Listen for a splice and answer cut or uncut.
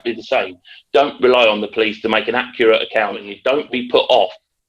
cut